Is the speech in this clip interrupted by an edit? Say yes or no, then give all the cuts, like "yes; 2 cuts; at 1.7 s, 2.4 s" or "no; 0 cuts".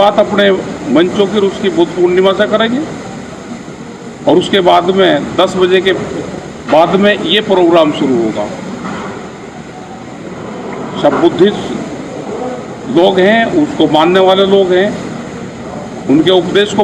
no; 0 cuts